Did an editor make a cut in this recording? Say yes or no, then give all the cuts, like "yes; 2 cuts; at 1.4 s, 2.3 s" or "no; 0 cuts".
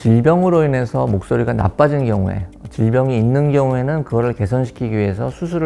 no; 0 cuts